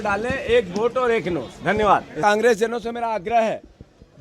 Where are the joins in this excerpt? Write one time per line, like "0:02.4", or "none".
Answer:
0:02.2